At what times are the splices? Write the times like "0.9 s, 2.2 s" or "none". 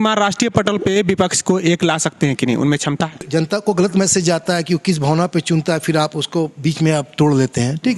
3.3 s